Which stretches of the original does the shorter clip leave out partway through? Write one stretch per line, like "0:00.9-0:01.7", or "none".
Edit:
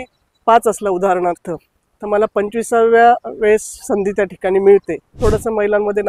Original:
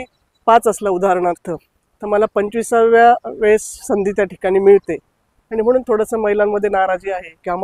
0:05.2-0:05.8